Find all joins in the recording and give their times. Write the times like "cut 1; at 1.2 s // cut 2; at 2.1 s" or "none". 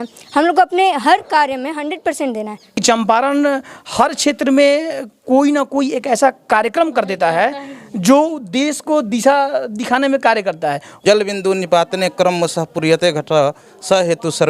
cut 1; at 2.8 s // cut 2; at 10.9 s